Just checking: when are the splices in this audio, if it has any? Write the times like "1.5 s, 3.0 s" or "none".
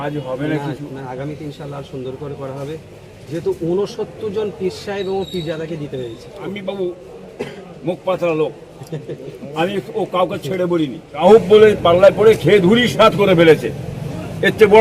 1.1 s, 6.5 s, 11.2 s